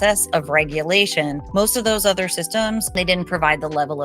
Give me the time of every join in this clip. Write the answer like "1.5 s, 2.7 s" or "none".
1.4 s, 2.9 s